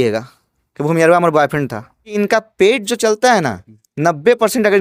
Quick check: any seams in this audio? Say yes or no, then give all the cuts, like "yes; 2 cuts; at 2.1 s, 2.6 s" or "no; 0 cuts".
yes; 1 cut; at 2.2 s